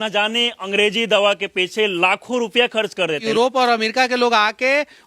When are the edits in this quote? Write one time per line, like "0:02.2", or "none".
0:03.2